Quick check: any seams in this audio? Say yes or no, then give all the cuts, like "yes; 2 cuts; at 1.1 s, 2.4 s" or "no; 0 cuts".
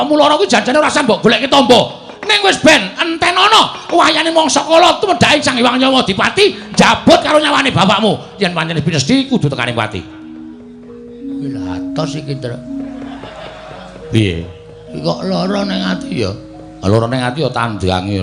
no; 0 cuts